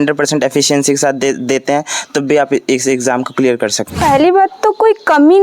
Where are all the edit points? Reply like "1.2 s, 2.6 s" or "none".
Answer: 3.9 s